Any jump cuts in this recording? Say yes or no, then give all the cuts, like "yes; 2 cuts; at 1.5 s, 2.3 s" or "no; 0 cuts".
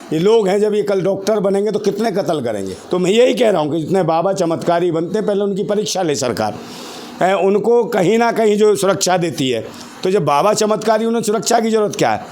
yes; 1 cut; at 2.7 s